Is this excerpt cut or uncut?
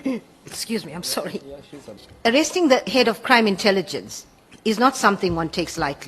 cut